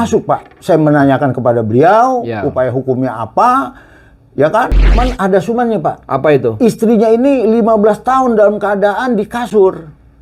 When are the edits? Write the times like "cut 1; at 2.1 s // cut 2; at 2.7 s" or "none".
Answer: cut 1; at 5.0 s